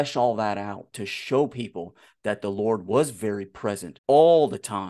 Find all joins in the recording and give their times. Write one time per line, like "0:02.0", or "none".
0:03.9